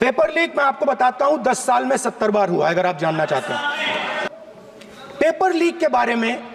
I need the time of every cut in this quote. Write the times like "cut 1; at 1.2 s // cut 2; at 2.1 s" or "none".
none